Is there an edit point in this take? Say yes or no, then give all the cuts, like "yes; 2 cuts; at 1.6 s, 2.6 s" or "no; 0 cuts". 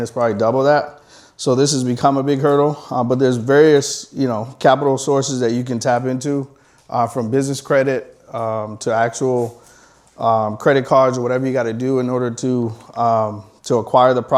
no; 0 cuts